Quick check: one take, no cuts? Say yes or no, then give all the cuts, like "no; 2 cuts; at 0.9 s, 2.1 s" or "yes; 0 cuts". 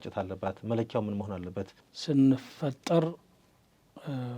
no; 1 cut; at 1.8 s